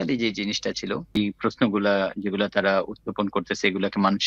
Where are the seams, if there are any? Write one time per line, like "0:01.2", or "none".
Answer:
0:01.2

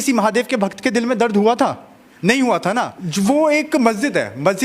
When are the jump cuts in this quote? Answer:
0:03.0

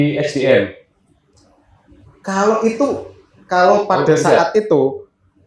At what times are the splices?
none

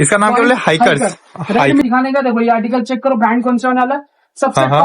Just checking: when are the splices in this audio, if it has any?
0:01.8

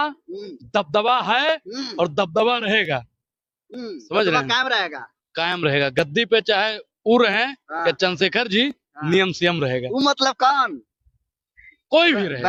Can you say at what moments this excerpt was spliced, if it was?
none

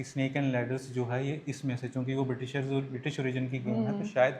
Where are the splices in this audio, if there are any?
none

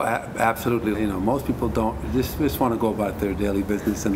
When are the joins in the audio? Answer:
0:00.9

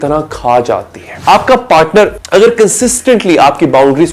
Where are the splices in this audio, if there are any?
0:01.0
0:02.2

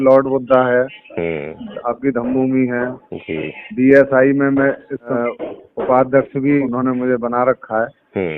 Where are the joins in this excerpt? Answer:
0:05.1
0:06.7

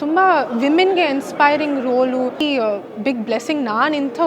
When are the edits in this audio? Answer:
0:02.4

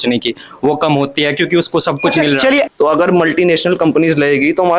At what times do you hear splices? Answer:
0:02.7

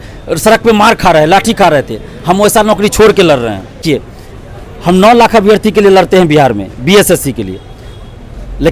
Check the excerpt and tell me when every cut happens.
0:03.8

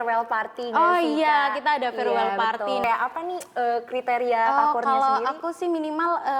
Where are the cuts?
0:02.8

